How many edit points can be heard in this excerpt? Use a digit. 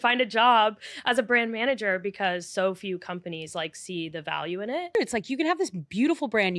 1